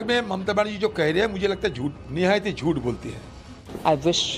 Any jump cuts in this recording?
yes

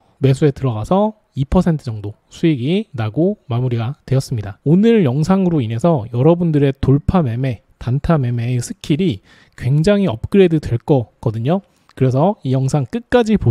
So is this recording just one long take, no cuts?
no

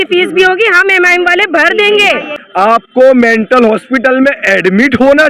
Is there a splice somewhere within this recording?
yes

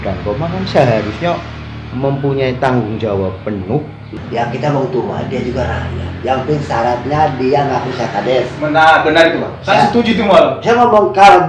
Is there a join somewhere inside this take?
yes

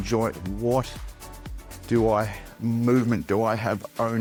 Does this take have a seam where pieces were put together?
no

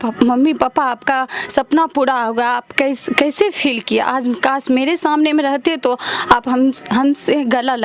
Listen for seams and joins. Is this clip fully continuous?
yes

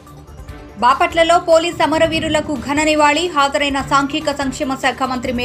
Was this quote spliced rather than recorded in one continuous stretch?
no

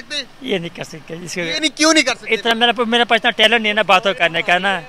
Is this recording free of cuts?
yes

